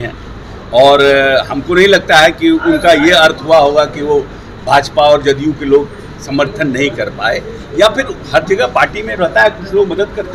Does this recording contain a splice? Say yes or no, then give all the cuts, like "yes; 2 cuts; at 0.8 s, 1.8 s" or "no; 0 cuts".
no; 0 cuts